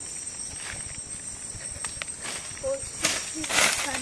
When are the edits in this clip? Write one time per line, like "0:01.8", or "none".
none